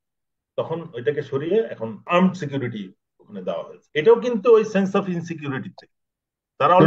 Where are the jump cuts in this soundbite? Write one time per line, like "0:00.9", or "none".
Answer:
0:02.0
0:03.8